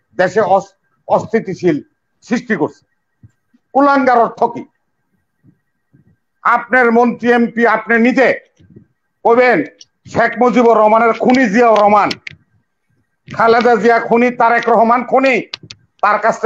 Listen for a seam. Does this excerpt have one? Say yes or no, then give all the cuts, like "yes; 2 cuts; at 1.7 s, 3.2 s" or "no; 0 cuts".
no; 0 cuts